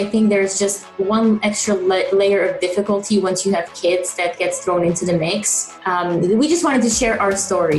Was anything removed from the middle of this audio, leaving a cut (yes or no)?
no